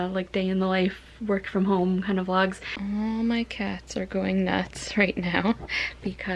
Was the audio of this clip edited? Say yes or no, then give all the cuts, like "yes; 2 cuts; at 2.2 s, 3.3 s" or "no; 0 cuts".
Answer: yes; 1 cut; at 2.7 s